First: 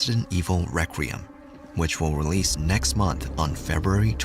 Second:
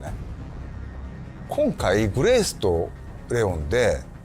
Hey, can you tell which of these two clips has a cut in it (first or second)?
first